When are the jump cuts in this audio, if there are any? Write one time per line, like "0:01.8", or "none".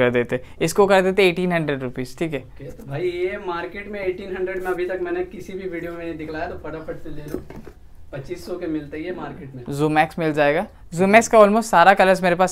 none